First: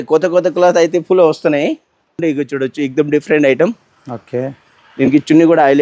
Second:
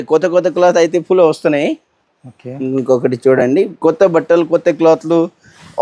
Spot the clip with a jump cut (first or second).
first